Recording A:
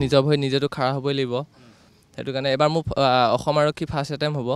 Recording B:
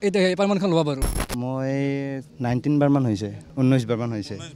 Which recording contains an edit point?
B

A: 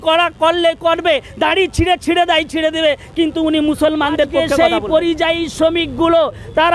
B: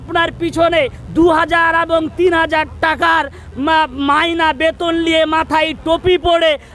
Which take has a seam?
A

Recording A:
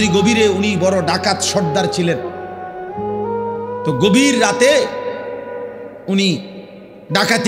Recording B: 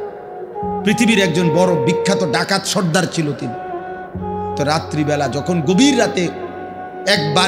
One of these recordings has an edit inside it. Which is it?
A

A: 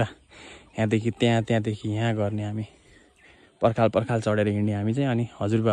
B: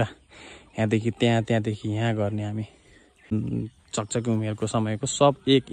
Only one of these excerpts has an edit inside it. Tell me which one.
B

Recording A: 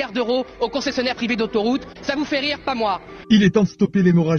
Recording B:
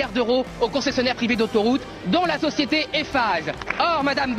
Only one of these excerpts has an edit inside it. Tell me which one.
A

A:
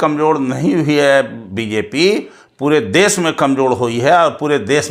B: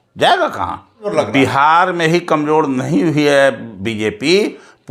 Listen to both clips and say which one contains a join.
B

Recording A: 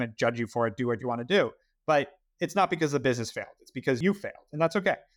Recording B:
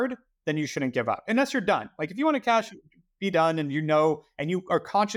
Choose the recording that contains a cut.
A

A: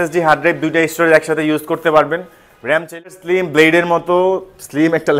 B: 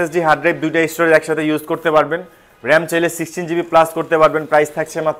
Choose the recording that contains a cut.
A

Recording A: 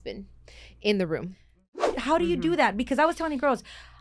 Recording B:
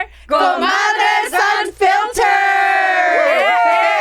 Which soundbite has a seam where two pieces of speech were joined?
A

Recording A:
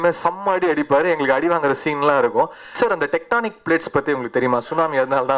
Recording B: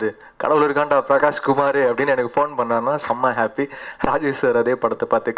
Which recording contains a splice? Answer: A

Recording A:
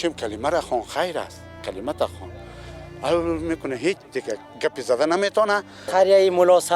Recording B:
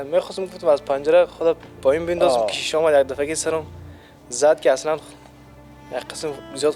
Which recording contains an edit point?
A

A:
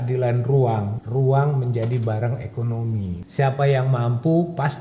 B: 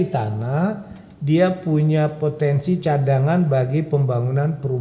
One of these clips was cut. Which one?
A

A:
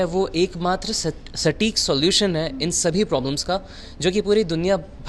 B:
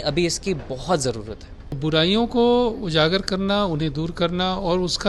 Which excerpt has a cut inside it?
B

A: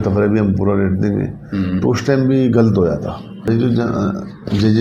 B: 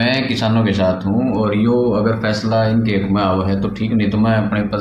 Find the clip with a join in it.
A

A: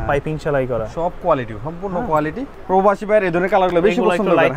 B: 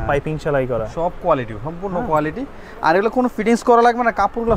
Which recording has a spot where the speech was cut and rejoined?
A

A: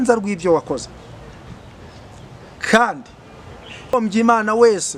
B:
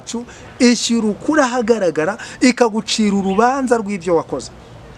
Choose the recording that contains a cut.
A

